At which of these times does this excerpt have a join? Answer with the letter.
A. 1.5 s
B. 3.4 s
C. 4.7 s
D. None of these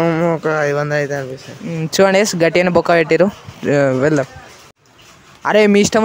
C